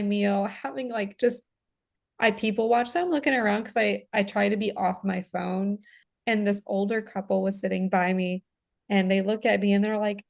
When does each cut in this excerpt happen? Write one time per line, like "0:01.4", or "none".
0:06.1